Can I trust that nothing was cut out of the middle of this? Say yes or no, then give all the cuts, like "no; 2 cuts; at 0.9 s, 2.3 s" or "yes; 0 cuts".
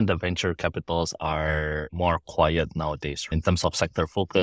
no; 2 cuts; at 1.9 s, 3.3 s